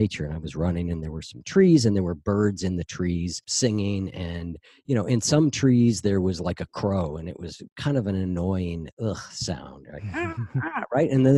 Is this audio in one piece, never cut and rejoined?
no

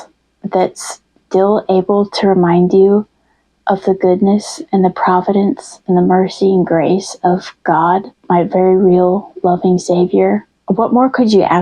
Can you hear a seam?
yes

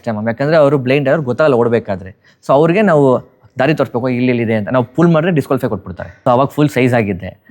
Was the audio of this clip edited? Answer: yes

